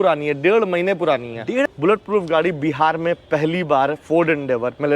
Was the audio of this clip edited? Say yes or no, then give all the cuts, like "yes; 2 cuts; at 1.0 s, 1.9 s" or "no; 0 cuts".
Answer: yes; 1 cut; at 1.7 s